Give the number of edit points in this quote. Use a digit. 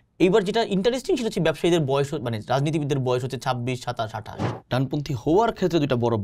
1